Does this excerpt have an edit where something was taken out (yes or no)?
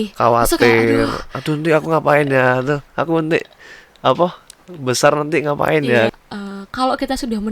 yes